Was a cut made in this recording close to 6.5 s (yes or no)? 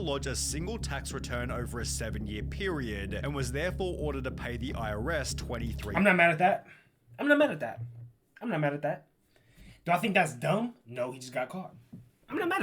no